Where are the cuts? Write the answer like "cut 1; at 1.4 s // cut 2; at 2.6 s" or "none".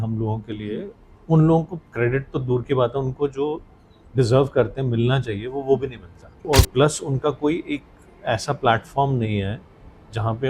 cut 1; at 6.4 s